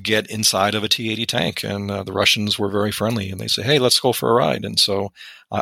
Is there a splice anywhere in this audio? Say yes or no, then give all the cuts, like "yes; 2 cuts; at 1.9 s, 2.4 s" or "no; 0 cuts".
no; 0 cuts